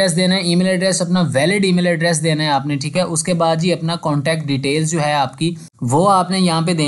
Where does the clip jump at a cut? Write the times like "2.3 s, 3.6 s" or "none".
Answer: none